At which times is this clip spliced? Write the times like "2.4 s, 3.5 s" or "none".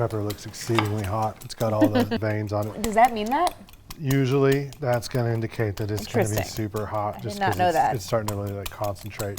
2.7 s